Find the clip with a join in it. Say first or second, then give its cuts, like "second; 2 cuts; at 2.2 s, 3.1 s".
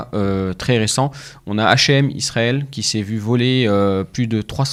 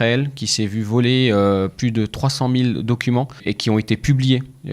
second; 1 cut; at 3.5 s